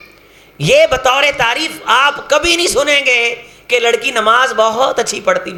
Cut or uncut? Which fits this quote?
uncut